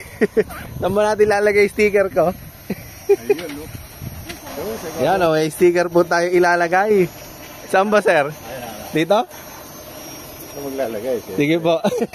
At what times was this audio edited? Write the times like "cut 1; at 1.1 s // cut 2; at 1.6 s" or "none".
cut 1; at 5.0 s

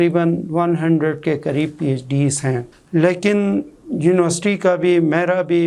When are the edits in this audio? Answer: none

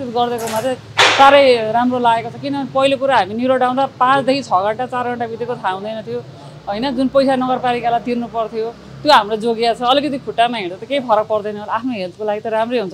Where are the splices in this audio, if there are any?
none

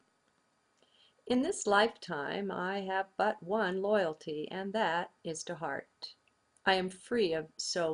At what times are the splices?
cut 1; at 1.5 s

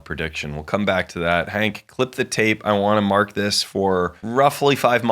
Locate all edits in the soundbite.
cut 1; at 4.2 s

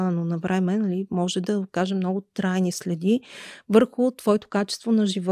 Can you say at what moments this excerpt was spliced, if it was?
none

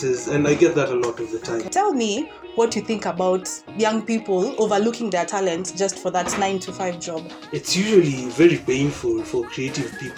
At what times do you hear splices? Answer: cut 1; at 1.7 s // cut 2; at 7.4 s

